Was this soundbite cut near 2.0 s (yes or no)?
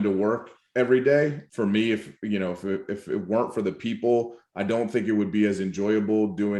no